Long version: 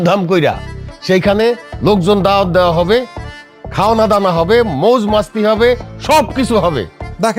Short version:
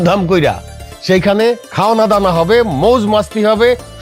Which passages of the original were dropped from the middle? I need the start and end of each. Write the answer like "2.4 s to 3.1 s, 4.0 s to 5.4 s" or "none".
1.7 s to 3.7 s